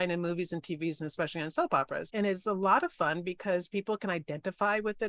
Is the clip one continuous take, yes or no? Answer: no